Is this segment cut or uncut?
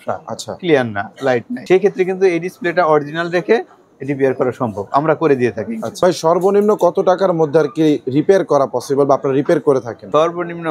cut